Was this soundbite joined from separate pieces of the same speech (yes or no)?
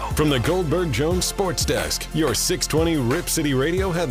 no